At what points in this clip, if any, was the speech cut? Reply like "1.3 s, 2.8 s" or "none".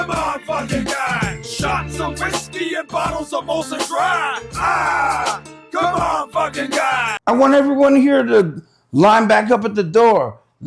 7.1 s

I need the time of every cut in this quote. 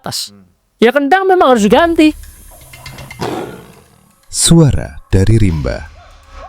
2.3 s

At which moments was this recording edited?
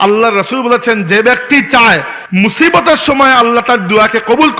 2.2 s

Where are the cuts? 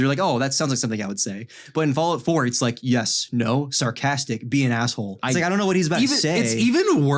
5.2 s

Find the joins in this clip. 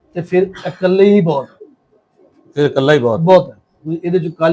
none

